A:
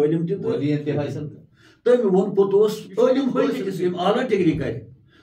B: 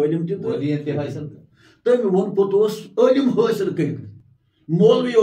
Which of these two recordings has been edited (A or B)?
A